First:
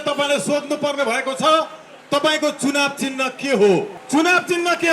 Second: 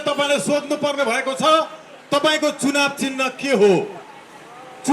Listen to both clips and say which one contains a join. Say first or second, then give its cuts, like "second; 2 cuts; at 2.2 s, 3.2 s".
first; 1 cut; at 4.0 s